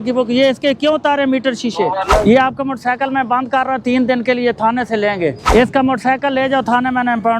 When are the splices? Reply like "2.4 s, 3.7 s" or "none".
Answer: 2.1 s, 5.4 s